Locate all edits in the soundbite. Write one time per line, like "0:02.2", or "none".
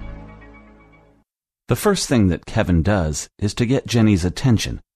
none